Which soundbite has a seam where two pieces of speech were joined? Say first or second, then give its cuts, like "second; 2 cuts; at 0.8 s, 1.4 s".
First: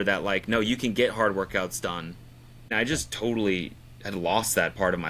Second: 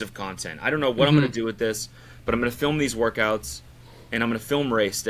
first; 1 cut; at 2.7 s